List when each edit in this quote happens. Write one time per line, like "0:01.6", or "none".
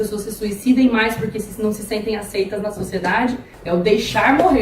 0:03.5